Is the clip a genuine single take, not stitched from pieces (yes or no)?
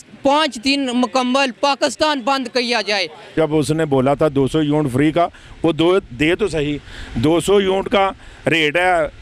no